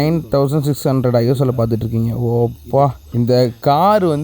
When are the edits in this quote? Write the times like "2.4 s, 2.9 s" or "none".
3.0 s